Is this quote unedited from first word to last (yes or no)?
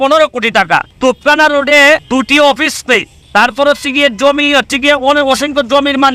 no